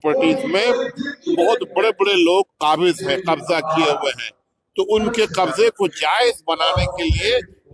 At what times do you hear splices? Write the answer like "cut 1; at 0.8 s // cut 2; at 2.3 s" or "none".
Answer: none